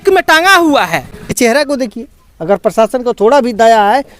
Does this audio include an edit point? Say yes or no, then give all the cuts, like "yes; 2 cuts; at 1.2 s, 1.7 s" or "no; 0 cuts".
yes; 1 cut; at 1.3 s